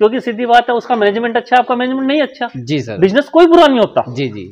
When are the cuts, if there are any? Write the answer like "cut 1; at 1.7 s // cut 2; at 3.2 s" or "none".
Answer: none